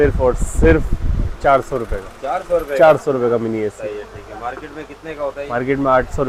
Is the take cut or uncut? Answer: uncut